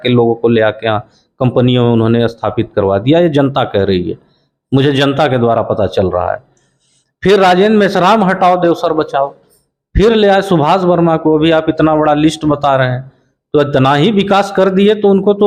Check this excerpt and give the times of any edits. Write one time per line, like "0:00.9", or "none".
none